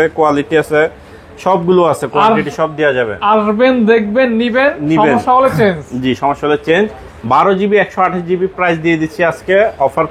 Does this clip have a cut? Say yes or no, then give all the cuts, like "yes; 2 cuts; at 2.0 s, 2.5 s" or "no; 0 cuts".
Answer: no; 0 cuts